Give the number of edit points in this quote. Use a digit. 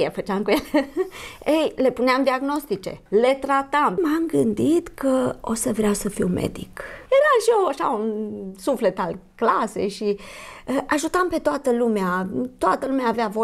3